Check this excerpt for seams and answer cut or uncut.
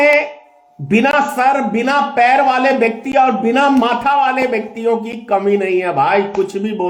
uncut